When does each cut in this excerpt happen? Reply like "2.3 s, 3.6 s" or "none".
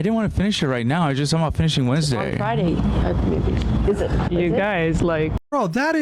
none